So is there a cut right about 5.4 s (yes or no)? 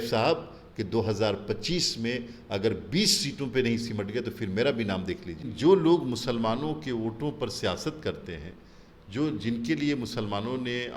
yes